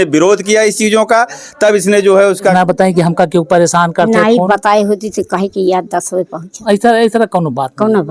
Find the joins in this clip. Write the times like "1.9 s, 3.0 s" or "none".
none